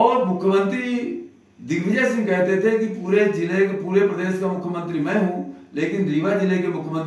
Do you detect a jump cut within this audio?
no; 0 cuts

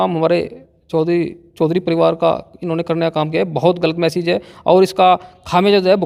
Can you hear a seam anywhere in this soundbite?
no; 0 cuts

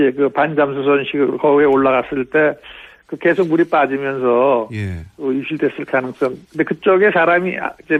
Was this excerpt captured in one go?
yes; 0 cuts

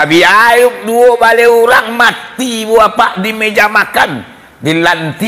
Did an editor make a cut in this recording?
no; 0 cuts

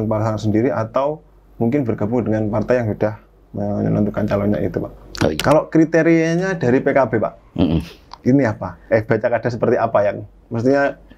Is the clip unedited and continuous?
no; 1 cut; at 5.4 s

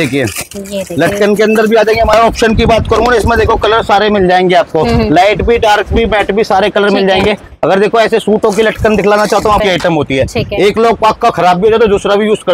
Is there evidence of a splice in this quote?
yes; 2 cuts; at 2.1 s, 9.6 s

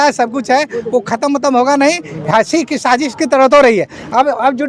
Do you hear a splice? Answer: no; 0 cuts

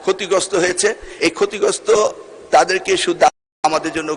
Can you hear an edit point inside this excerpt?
no; 0 cuts

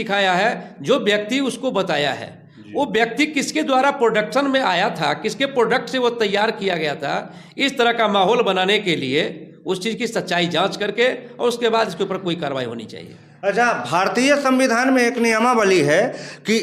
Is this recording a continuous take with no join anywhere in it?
yes; 0 cuts

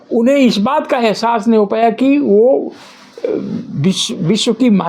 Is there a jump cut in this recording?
no; 0 cuts

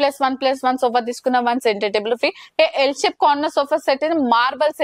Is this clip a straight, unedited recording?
yes; 0 cuts

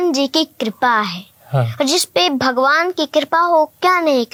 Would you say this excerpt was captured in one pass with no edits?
yes; 0 cuts

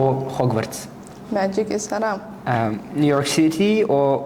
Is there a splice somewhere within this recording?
yes; 1 cut; at 2.3 s

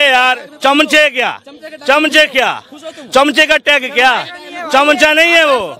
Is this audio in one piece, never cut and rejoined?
yes; 0 cuts

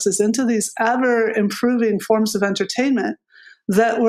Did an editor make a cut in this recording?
no; 0 cuts

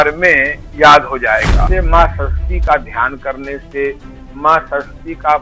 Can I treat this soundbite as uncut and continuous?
no; 1 cut; at 1.7 s

